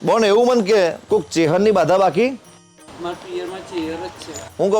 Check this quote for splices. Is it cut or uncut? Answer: cut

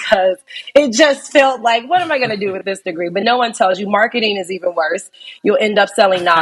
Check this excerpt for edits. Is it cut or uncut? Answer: uncut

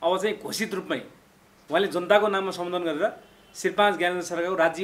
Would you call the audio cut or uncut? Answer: uncut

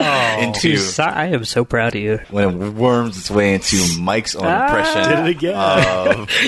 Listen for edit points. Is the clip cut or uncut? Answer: cut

